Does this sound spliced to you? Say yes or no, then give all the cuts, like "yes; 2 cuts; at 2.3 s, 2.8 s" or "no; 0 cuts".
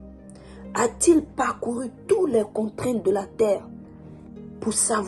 no; 0 cuts